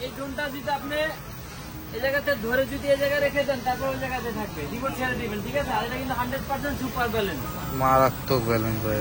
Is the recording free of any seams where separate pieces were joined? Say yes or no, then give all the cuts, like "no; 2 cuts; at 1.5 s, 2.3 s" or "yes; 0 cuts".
yes; 0 cuts